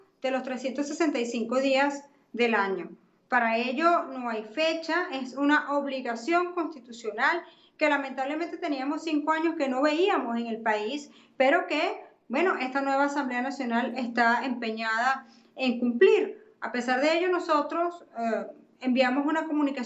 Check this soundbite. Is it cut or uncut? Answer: cut